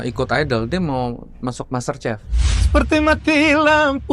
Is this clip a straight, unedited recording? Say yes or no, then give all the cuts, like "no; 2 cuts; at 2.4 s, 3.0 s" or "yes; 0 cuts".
no; 1 cut; at 2.3 s